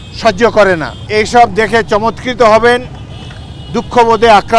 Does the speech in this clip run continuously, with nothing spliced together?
no; 1 cut; at 1.0 s

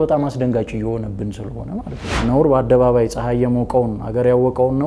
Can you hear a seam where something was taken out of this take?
yes; 1 cut; at 2.1 s

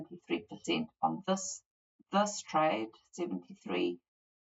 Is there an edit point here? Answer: no; 0 cuts

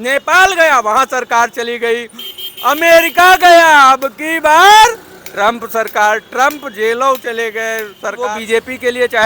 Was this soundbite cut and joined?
yes; 1 cut; at 8.3 s

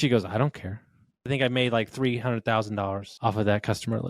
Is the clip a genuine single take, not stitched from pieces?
no; 2 cuts; at 1.3 s, 3.1 s

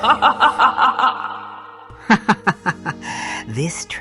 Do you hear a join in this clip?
yes; 1 cut; at 1.2 s

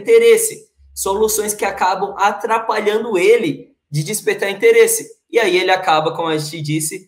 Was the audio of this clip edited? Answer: no; 0 cuts

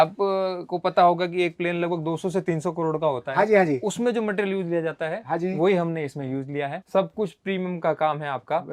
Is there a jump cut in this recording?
yes; 1 cut; at 6.8 s

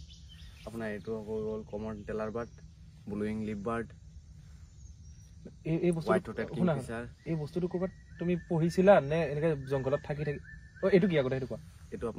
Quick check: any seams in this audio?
no; 0 cuts

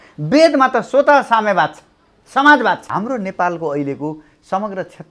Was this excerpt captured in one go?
no; 1 cut; at 2.9 s

